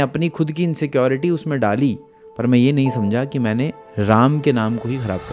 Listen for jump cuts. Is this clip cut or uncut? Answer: uncut